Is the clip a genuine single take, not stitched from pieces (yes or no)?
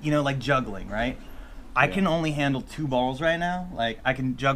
yes